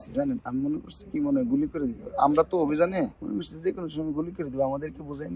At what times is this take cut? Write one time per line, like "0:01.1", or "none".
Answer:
none